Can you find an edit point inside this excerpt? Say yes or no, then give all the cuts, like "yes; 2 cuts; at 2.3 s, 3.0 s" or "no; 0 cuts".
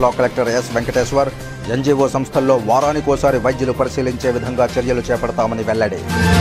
no; 0 cuts